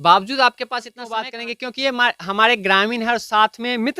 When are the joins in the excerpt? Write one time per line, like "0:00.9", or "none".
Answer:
0:01.0

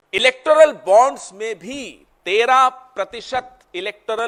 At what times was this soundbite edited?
none

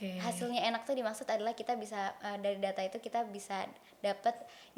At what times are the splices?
none

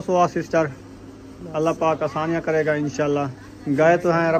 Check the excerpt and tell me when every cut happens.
none

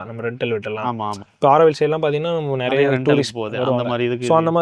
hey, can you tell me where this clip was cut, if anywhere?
none

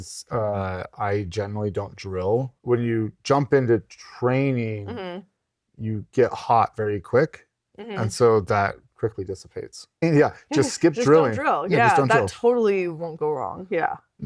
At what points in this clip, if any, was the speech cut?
0:02.5
0:10.0

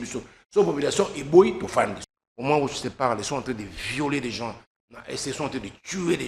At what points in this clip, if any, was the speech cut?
0:02.0

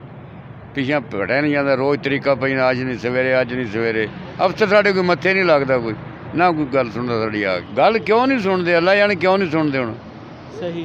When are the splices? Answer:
0:07.6

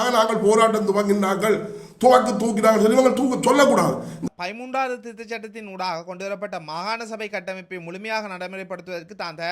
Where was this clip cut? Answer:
0:04.1

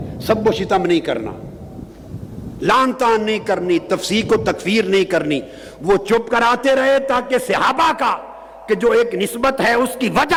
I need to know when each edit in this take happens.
none

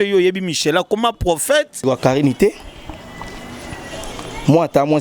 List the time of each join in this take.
0:01.8

